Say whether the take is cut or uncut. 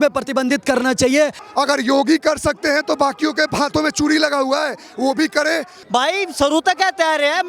cut